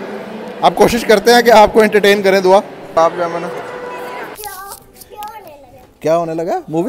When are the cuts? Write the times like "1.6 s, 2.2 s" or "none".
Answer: 2.8 s, 4.3 s